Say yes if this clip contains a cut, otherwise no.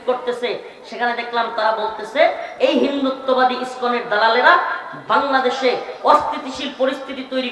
no